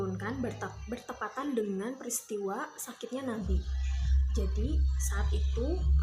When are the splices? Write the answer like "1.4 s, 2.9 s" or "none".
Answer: none